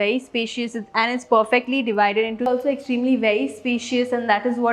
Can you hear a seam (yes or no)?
yes